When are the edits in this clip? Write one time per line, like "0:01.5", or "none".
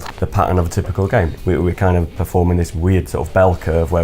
0:01.3